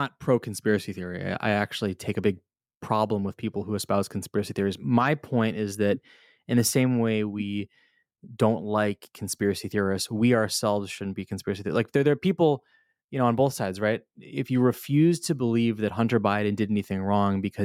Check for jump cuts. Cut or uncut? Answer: uncut